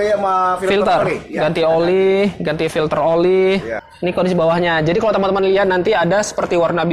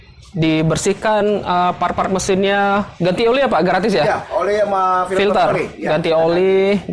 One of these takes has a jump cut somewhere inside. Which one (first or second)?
first